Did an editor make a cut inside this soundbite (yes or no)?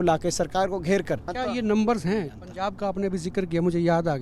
yes